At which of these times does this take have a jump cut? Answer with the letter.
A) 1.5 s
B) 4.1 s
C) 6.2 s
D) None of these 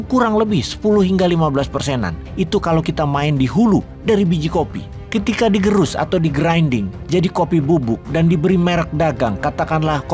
D